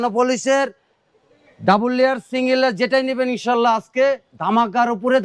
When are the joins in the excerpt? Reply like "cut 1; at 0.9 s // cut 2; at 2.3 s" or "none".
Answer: none